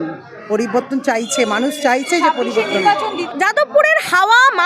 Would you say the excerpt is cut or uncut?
cut